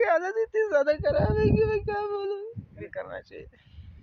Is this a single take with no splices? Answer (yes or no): no